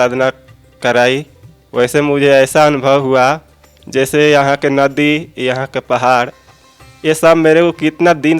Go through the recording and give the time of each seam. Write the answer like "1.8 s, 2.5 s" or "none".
none